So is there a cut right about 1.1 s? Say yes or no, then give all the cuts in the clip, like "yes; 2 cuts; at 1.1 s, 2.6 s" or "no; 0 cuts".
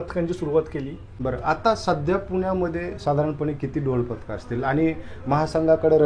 yes; 1 cut; at 1.1 s